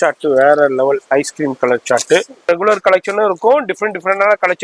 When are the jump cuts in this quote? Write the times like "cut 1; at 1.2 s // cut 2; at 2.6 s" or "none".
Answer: cut 1; at 2.4 s